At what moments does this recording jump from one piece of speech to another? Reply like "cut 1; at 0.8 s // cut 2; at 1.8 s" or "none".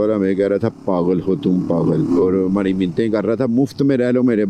cut 1; at 2.1 s